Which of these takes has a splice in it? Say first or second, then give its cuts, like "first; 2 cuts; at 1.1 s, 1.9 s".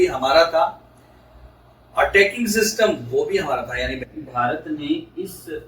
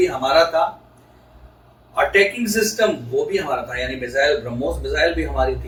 first; 1 cut; at 4.0 s